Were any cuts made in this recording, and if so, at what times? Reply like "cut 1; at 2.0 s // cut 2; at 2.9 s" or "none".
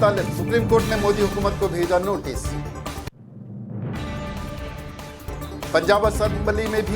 cut 1; at 3.3 s // cut 2; at 5.3 s